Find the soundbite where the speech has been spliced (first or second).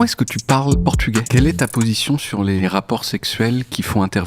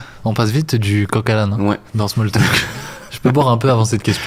first